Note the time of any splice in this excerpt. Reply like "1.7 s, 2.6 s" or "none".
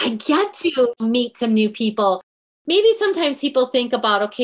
1.0 s, 2.4 s